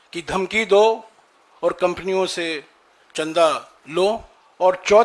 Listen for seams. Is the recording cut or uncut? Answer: uncut